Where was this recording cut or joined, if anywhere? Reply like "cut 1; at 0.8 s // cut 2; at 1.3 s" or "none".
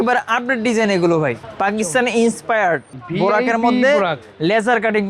cut 1; at 1.4 s // cut 2; at 3.0 s